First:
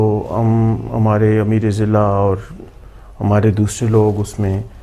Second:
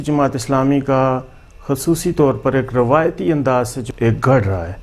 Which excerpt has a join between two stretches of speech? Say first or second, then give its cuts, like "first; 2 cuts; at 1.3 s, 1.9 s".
second; 1 cut; at 3.9 s